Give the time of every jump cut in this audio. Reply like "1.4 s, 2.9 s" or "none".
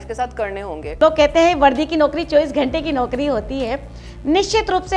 1.0 s